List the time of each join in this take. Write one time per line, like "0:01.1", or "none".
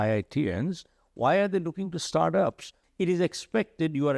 0:02.8